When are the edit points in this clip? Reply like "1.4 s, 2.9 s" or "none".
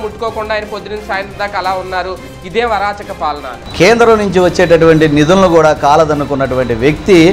3.6 s